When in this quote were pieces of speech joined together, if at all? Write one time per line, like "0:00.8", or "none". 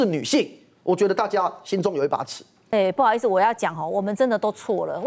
0:02.6